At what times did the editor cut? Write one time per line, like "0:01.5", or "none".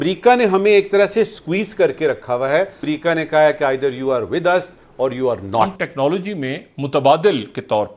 0:02.8
0:05.7